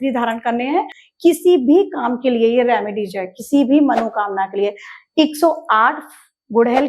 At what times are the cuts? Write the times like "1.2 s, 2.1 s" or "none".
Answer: 1.0 s